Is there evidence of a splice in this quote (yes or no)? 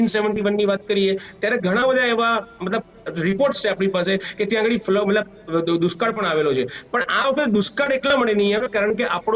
no